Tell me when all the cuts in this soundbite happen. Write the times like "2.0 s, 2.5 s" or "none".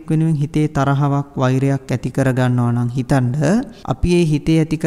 3.8 s